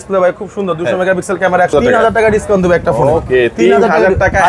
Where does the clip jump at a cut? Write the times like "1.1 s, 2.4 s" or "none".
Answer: 1.7 s